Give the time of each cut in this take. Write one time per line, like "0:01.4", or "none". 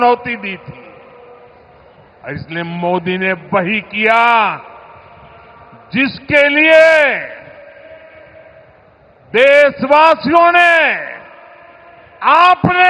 none